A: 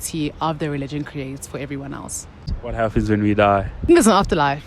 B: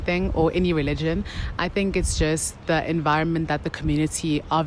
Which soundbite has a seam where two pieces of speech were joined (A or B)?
A